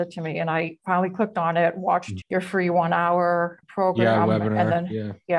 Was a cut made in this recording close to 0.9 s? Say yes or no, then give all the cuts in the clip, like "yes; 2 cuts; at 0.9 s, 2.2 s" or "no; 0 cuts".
no; 2 cuts; at 2.1 s, 3.6 s